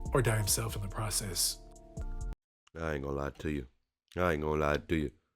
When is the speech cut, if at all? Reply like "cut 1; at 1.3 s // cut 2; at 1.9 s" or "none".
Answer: cut 1; at 1.9 s